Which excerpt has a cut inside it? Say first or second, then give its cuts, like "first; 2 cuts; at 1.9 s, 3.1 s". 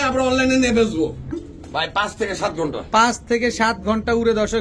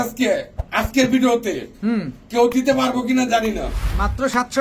first; 1 cut; at 1.3 s